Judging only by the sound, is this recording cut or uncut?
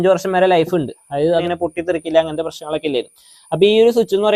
cut